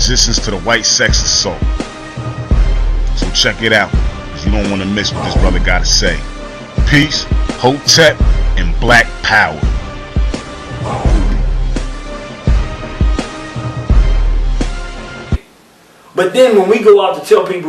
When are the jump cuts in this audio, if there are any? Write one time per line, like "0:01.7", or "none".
none